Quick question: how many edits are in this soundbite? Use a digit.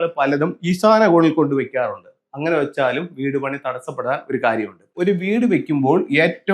1